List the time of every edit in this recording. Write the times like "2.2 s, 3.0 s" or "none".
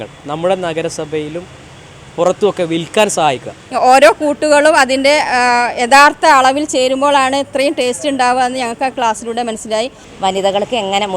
3.6 s, 10.0 s